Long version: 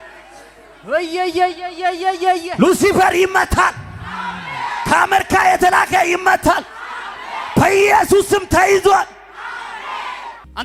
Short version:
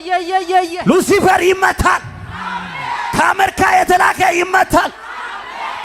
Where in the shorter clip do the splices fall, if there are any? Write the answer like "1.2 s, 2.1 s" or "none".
none